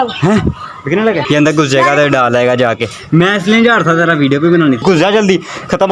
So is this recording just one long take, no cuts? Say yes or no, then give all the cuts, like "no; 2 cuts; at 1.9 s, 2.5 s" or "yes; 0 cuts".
no; 2 cuts; at 1.2 s, 4.8 s